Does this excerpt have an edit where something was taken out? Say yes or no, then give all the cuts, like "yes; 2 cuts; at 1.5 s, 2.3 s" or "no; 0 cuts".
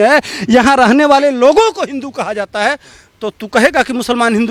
no; 0 cuts